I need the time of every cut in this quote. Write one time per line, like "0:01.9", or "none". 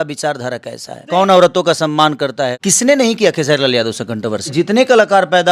0:01.0
0:02.6
0:04.5